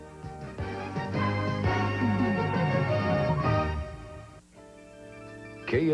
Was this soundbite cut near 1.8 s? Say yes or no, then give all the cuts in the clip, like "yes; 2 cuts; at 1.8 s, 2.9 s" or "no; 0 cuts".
no; 1 cut; at 4.6 s